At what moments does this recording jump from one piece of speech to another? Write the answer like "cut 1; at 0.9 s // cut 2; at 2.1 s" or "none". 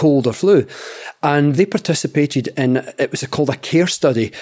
cut 1; at 1.5 s